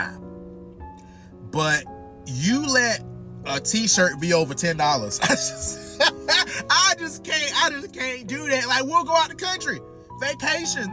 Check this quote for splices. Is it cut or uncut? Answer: uncut